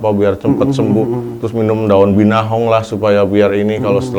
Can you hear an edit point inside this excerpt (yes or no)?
no